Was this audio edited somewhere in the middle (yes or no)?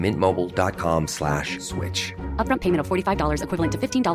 no